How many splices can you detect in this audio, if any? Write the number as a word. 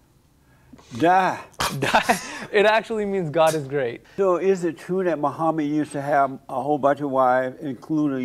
one